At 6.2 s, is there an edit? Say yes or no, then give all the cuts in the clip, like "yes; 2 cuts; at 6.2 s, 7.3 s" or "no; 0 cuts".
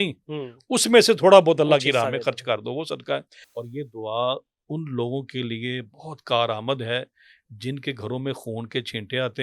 no; 1 cut; at 3.4 s